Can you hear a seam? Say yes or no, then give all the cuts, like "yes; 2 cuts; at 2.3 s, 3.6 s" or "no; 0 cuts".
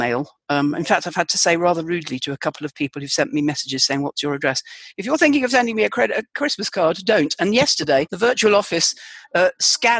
yes; 1 cut; at 8.1 s